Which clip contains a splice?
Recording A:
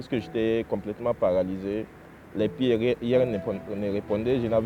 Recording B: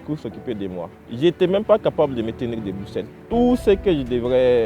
B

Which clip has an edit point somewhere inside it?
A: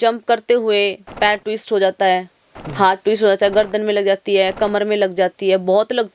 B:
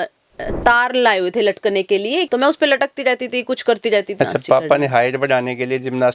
B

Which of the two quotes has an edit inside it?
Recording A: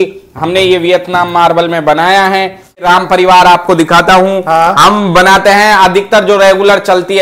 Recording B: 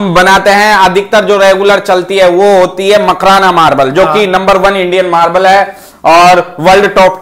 A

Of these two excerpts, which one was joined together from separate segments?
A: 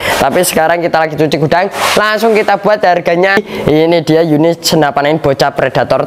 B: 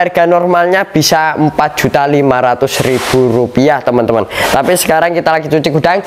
A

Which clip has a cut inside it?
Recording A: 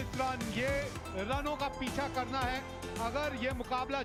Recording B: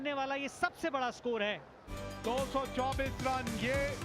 B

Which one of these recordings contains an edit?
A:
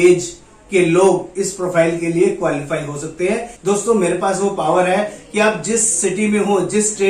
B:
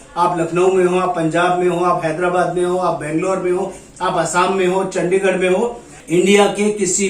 A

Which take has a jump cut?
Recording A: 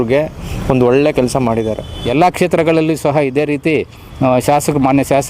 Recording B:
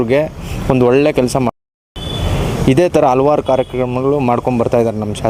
A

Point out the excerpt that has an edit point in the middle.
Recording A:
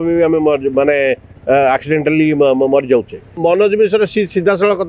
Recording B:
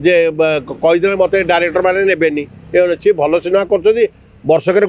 A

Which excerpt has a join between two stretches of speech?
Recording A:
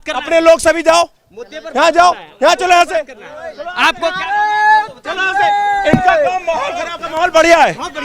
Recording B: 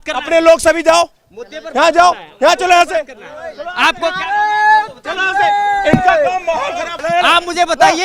B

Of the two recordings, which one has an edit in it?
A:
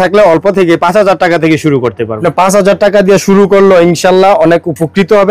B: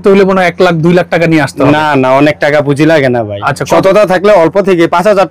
A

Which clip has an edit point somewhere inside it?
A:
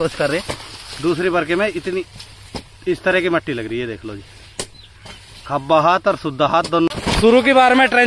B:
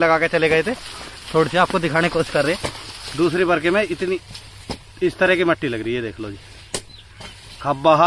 A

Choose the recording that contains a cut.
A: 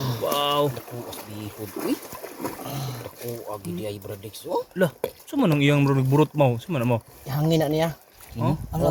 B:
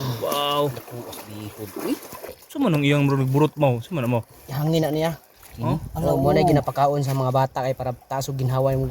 B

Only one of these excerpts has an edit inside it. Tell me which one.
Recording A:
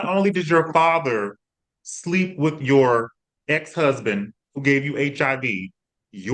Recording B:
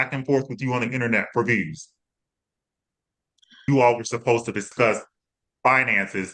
B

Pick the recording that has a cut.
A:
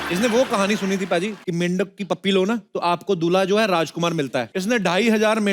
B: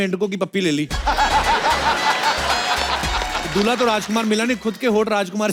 A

